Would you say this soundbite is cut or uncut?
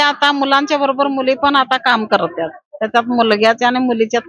uncut